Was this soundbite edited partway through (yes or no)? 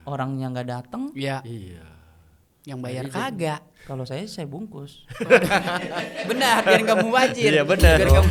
no